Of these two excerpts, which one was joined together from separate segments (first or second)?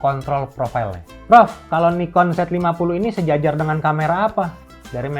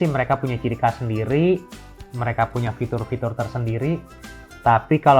first